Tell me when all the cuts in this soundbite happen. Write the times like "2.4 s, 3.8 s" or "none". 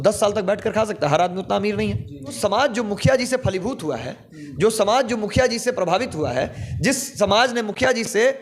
2.4 s